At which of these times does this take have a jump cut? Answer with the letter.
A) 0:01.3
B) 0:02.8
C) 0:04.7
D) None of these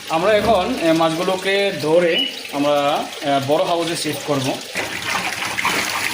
C